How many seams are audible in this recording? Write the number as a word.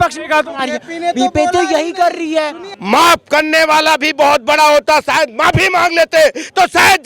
one